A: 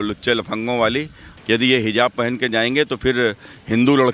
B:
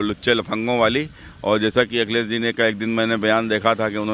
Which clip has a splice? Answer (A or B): A